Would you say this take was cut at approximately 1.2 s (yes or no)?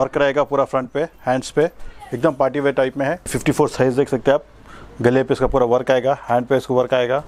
no